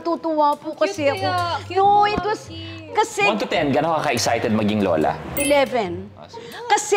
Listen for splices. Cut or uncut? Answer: uncut